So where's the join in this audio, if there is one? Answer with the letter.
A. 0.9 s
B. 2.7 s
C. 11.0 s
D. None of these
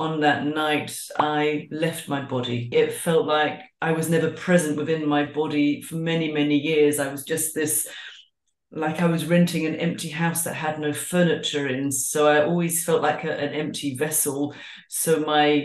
B